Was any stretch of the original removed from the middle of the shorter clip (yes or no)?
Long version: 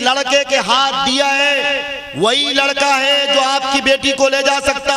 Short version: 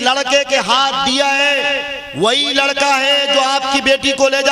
no